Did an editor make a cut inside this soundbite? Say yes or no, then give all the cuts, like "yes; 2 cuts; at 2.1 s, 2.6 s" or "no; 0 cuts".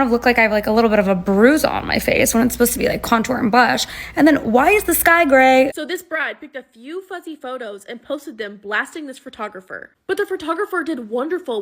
yes; 1 cut; at 5.7 s